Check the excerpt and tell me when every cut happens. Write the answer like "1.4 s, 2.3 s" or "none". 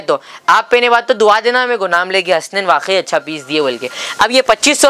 none

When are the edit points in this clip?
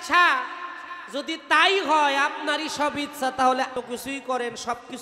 3.7 s

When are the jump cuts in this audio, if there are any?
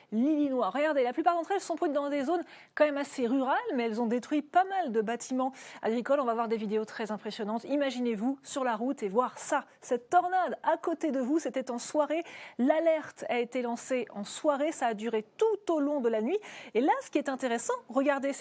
5.4 s

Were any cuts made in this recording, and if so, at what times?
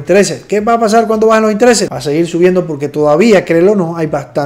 1.9 s

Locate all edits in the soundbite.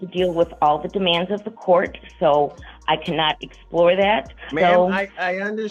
4.5 s

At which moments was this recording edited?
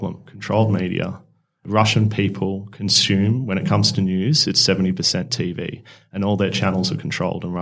1.6 s

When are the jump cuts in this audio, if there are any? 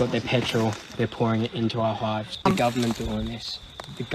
2.3 s

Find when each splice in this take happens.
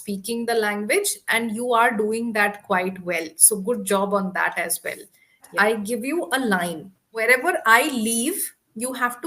5.5 s, 7.2 s

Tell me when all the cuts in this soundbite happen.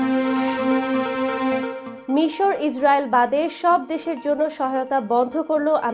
none

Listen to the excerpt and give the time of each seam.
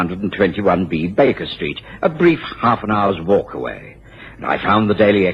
3.7 s

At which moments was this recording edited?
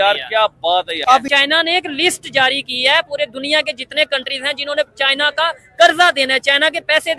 1.2 s

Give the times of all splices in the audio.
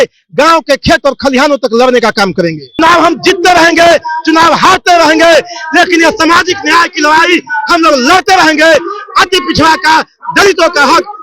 2.8 s

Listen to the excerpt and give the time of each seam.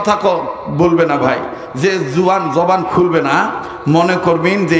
none

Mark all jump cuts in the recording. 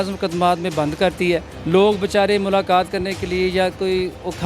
1.5 s

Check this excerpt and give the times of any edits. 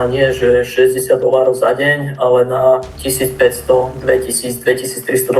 none

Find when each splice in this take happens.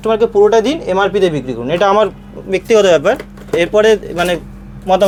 none

